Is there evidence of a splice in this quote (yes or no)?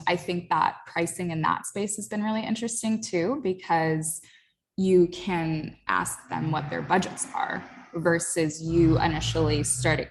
no